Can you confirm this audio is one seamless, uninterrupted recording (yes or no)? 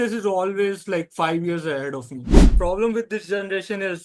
no